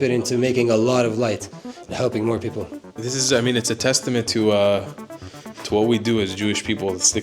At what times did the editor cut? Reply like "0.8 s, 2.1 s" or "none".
3.0 s